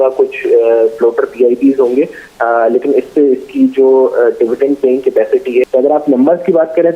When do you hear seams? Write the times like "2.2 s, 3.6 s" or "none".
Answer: 5.7 s